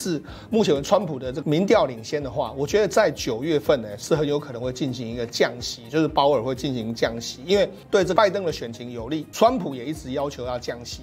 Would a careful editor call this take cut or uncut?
uncut